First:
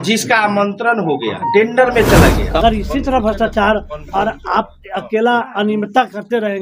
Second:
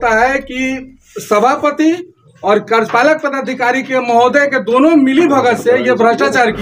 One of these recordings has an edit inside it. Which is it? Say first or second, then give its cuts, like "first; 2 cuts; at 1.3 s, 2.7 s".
first; 1 cut; at 2.4 s